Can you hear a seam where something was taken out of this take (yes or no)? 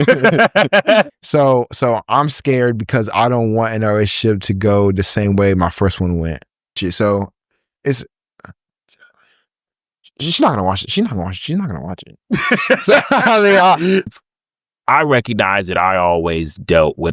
yes